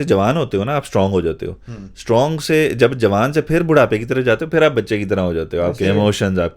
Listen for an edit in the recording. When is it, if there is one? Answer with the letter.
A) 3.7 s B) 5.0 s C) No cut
C